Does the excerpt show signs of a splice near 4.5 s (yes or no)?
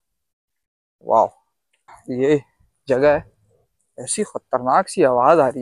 no